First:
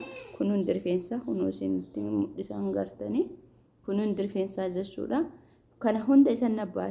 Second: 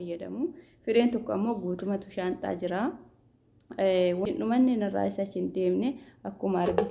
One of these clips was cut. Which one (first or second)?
second